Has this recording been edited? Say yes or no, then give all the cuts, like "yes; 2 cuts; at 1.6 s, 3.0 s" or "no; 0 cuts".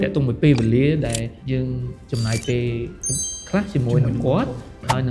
yes; 1 cut; at 1.4 s